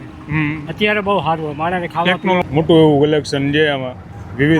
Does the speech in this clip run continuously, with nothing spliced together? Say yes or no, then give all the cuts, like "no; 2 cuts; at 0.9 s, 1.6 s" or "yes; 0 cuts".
no; 1 cut; at 2.4 s